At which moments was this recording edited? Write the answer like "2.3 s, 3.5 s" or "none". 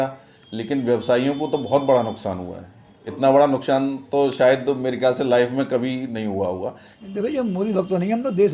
6.9 s